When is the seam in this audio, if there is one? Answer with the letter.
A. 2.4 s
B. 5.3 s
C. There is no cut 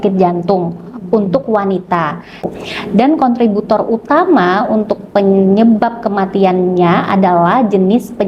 A